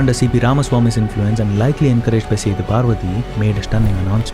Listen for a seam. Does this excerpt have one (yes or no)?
yes